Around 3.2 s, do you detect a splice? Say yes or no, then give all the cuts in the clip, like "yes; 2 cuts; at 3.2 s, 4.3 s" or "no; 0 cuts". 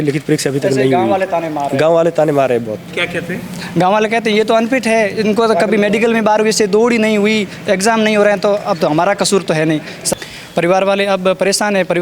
no; 1 cut; at 10.0 s